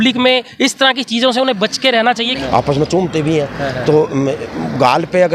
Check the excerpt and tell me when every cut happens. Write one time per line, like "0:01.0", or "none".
0:02.4

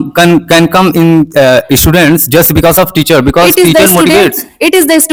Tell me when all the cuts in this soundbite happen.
none

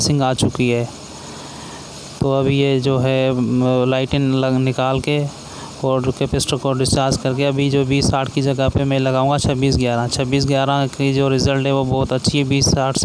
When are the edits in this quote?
none

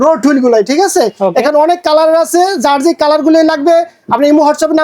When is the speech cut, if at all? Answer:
none

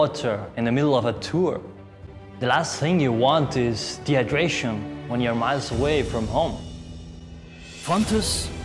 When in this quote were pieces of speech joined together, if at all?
0:02.0
0:07.2

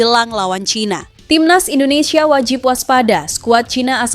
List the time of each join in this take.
0:01.1

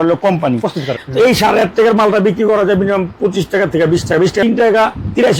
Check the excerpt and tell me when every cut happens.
0:01.0
0:04.4

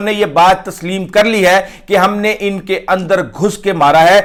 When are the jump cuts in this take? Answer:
none

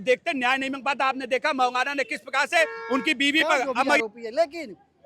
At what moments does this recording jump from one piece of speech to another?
0:04.0

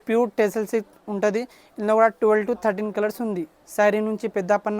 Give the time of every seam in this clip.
0:03.6

